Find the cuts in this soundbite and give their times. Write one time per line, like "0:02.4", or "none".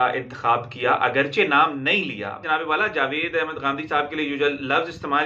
0:02.4